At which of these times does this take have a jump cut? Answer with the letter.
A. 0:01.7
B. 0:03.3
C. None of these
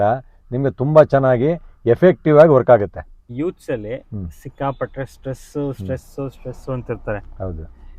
B